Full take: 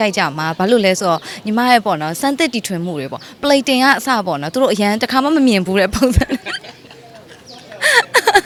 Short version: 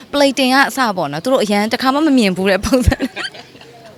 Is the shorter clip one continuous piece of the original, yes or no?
yes